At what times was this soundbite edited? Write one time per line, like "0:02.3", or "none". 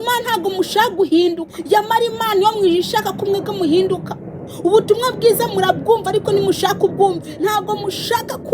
0:01.5
0:07.3

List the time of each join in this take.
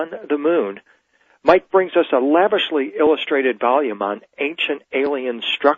none

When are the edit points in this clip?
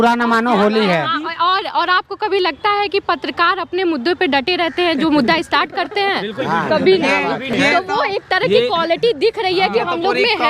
none

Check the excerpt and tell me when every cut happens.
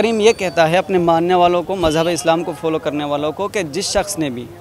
none

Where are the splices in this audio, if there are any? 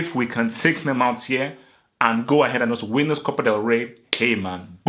none

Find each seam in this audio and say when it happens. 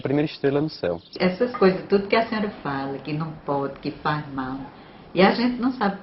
0:01.1

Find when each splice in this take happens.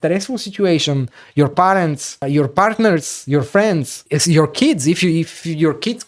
0:02.1
0:04.0

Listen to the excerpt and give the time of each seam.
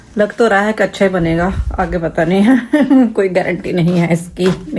none

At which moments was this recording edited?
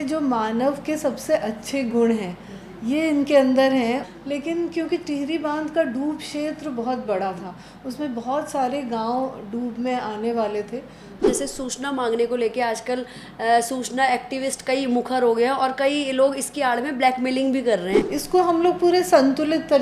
0:04.0
0:11.3
0:18.0

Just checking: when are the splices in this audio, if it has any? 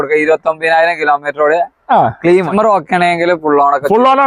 0:02.5

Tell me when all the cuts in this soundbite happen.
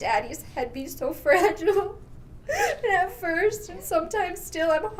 none

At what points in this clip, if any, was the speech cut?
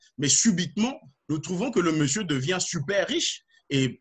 none

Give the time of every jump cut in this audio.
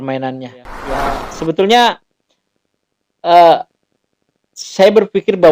0:01.2

